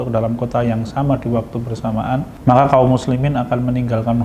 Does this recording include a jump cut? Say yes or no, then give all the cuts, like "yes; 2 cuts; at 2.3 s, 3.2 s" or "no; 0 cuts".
yes; 1 cut; at 2.3 s